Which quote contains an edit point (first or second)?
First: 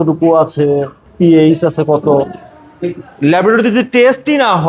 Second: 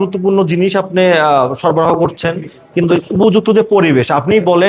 first